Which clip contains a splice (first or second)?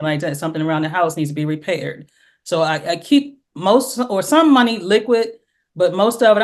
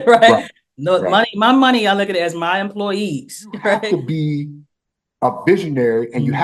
second